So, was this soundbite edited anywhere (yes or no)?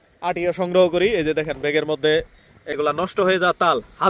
yes